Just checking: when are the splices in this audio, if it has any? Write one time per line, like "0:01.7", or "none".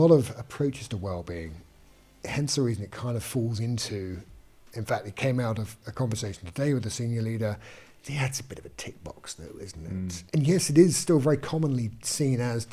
0:10.2